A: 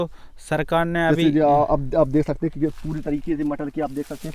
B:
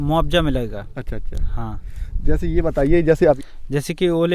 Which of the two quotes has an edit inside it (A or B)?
B